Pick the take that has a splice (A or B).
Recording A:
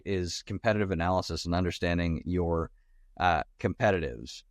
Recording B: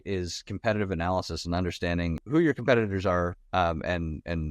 B